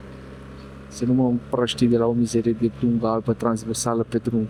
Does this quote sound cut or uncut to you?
uncut